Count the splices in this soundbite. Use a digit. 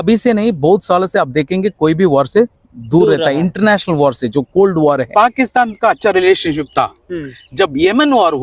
1